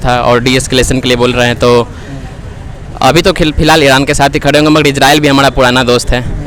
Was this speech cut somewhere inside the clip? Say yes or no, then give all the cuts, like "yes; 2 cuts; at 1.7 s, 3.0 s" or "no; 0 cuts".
no; 0 cuts